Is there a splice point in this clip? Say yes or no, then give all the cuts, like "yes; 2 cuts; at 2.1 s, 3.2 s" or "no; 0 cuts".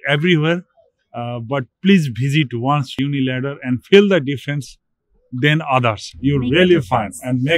yes; 1 cut; at 3.0 s